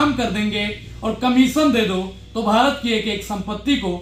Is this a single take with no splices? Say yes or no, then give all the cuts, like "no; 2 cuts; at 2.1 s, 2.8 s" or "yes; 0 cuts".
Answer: yes; 0 cuts